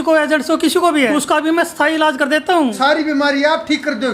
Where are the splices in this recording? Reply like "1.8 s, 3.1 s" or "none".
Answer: 1.1 s, 2.7 s